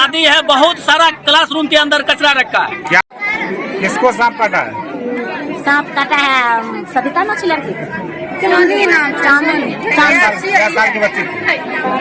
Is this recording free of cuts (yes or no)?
no